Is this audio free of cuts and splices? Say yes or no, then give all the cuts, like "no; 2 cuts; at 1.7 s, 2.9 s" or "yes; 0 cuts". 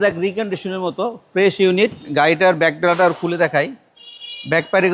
yes; 0 cuts